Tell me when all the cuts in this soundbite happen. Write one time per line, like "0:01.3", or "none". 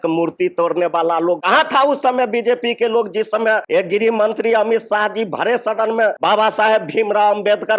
0:01.4
0:03.6
0:06.2

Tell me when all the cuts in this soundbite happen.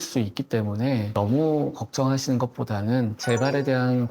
0:01.1
0:03.2

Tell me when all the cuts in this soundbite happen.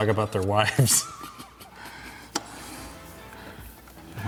none

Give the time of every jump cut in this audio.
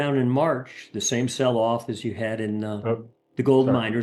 none

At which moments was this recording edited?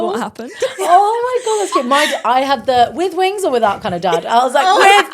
none

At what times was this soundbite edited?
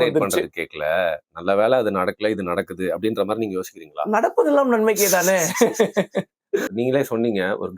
0:06.7

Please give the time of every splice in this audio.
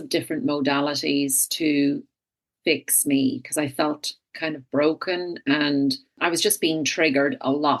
0:06.2

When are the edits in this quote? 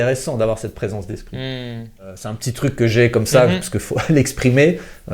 0:02.5

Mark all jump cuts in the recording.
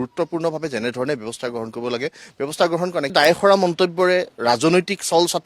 0:03.1

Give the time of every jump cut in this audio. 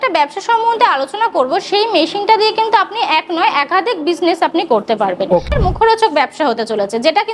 0:05.5

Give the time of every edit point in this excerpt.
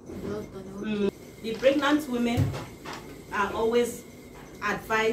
0:01.1

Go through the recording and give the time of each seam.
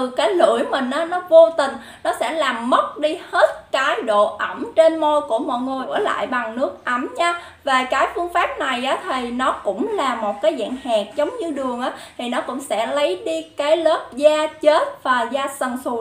0:05.9

